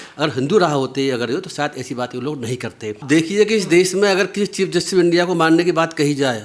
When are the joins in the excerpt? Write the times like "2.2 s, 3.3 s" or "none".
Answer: 3.0 s